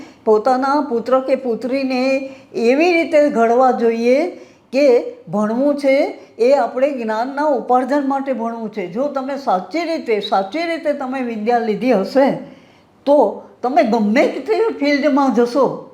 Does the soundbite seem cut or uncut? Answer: uncut